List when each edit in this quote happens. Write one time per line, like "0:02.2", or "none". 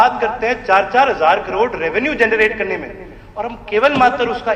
none